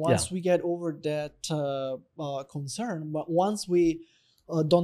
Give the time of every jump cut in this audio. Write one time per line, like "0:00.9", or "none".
none